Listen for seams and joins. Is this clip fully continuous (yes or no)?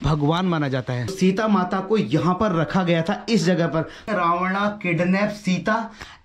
no